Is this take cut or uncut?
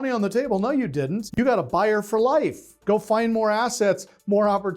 cut